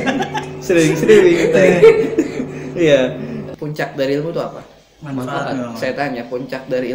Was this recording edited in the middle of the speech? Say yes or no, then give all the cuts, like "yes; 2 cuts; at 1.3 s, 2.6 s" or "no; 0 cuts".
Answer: yes; 1 cut; at 3.4 s